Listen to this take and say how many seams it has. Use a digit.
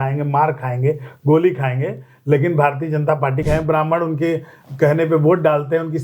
1